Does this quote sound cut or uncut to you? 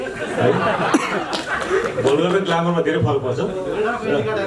uncut